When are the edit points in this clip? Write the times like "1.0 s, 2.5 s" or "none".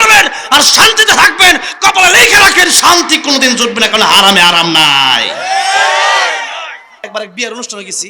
7.0 s